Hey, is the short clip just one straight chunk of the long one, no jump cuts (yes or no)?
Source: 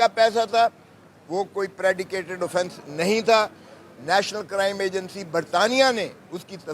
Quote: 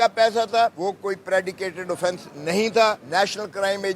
no